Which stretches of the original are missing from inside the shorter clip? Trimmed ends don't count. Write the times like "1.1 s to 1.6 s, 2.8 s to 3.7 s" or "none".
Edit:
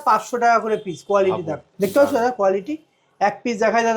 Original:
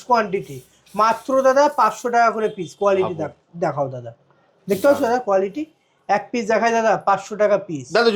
3.3 s to 4.5 s